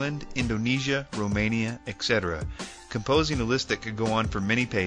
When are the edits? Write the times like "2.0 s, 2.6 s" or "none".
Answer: 1.9 s